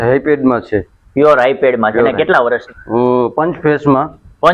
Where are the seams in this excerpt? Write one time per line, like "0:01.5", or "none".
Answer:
0:02.6